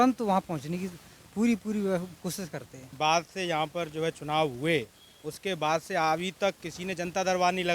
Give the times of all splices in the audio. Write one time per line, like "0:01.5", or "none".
0:02.9